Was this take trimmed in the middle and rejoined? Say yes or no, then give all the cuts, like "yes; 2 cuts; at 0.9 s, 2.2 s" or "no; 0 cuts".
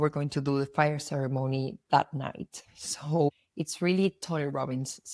no; 0 cuts